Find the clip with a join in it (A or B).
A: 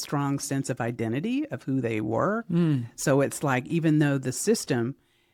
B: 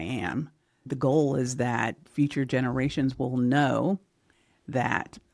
B